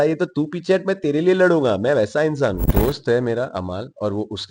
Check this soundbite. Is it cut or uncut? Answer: cut